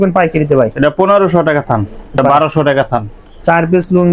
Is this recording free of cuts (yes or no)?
no